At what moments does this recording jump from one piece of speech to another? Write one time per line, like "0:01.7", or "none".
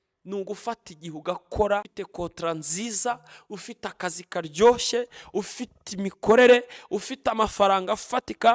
0:01.9